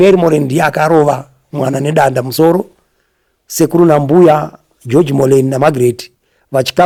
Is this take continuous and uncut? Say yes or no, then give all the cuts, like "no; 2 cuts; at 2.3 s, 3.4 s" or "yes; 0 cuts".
yes; 0 cuts